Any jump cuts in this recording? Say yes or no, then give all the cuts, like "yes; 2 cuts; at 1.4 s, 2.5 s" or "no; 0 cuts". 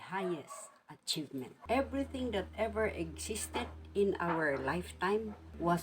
yes; 1 cut; at 1.5 s